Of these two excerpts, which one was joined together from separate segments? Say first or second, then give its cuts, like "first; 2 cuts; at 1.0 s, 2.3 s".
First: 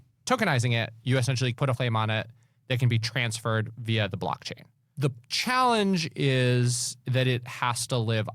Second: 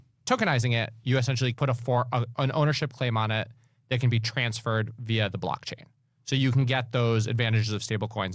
first; 2 cuts; at 1.8 s, 4.9 s